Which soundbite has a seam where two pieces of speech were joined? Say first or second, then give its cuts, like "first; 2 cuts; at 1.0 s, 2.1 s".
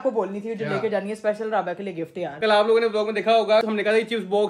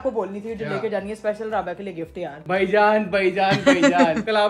first; 2 cuts; at 2.4 s, 3.6 s